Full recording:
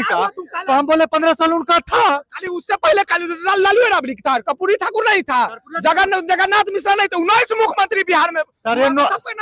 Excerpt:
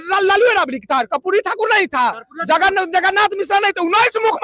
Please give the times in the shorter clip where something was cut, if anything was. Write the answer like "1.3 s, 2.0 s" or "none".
none

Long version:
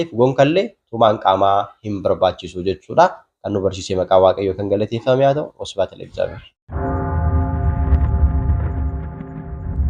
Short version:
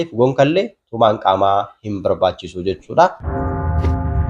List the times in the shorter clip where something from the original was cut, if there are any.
3.2 s

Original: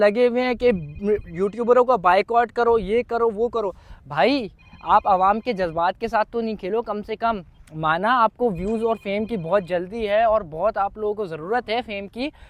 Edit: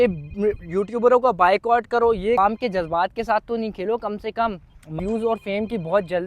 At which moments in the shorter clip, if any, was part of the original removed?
2.4 s, 5.0 s

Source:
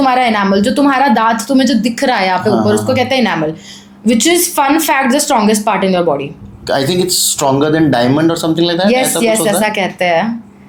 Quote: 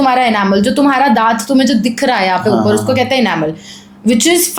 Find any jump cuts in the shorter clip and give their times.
none

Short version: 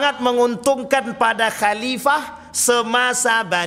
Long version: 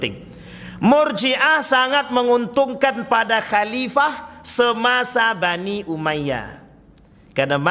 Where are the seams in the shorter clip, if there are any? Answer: none

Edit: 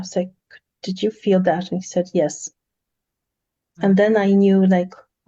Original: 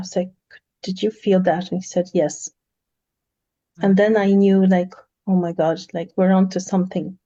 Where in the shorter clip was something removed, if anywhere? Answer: none

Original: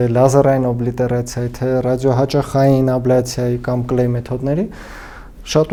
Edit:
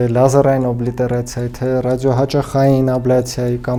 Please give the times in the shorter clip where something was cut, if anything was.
none

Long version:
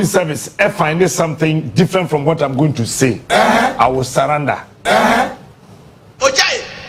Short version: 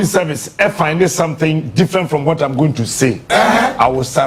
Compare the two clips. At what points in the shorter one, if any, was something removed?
none

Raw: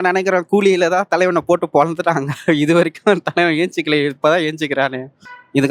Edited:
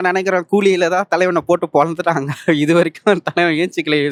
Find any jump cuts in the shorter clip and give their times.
none

